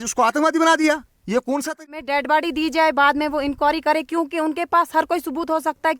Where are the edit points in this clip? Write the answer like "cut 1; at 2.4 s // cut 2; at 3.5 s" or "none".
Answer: cut 1; at 1.7 s